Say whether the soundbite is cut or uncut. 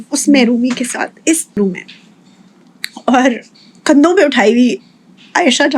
cut